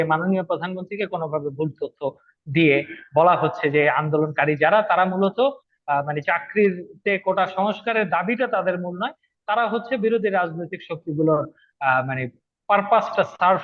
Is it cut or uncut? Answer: uncut